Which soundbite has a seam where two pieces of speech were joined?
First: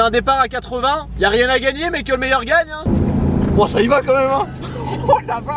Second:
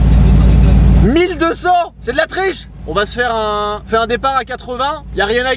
first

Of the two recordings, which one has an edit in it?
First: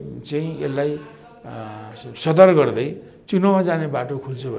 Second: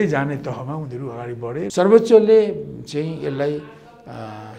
second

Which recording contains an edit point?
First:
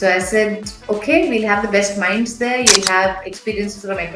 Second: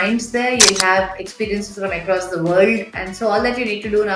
second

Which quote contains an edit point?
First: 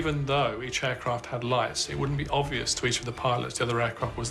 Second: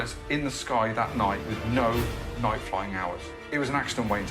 second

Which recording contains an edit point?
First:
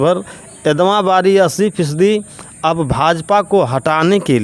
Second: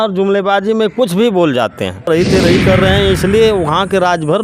second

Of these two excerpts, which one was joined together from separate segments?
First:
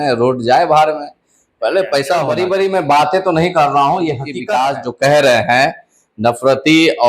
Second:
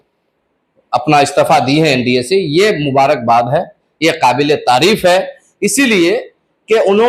first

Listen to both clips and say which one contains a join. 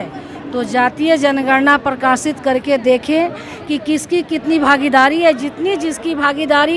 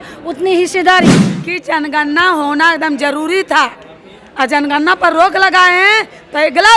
second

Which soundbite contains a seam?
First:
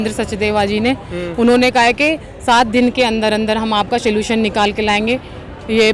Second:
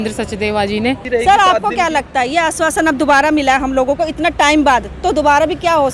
second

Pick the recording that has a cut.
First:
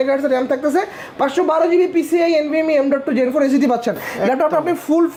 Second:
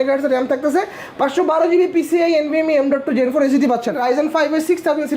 second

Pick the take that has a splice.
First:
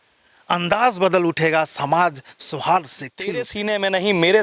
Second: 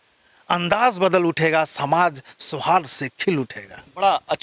first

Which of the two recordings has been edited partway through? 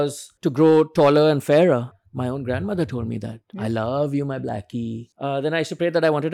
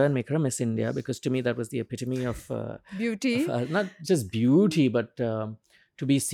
first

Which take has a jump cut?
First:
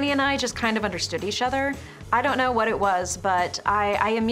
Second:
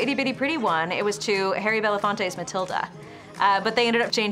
second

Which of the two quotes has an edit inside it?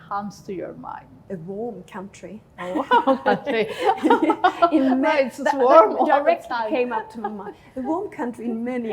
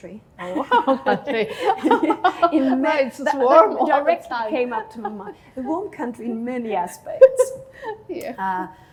first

